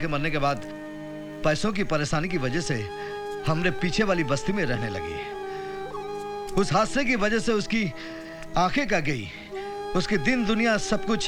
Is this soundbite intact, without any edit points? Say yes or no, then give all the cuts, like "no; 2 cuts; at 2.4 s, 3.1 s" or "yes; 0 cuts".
yes; 0 cuts